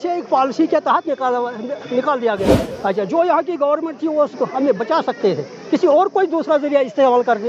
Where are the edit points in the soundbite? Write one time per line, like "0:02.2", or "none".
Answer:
0:02.6